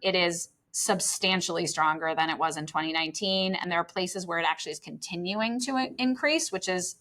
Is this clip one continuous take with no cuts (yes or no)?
yes